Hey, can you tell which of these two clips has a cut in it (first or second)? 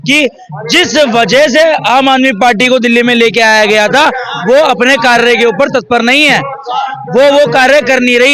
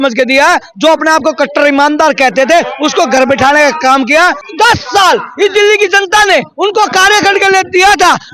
second